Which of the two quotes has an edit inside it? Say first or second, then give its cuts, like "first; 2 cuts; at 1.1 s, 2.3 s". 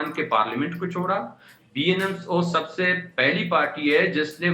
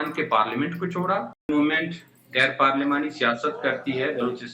second; 1 cut; at 1.5 s